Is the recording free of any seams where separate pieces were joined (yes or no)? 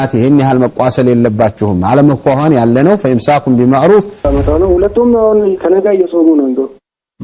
no